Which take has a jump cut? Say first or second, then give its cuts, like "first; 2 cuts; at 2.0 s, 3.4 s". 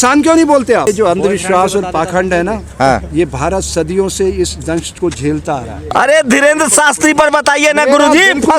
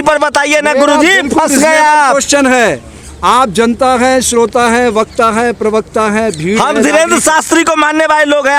first; 2 cuts; at 0.9 s, 5.8 s